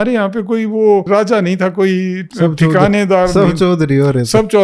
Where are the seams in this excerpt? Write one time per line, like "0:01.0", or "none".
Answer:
0:01.1
0:02.2